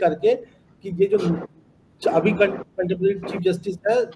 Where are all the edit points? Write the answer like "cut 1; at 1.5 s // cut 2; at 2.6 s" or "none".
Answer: none